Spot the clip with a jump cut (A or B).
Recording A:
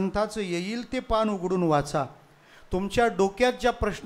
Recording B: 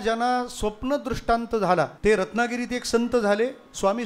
B